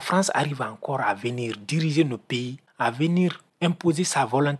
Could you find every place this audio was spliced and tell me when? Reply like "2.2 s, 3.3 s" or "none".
2.6 s, 3.5 s